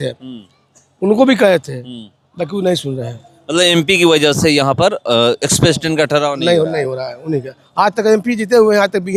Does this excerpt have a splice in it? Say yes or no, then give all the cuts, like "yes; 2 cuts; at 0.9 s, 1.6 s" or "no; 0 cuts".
no; 0 cuts